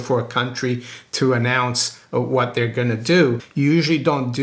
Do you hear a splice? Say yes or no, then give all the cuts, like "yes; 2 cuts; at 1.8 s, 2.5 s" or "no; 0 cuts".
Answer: yes; 1 cut; at 3.5 s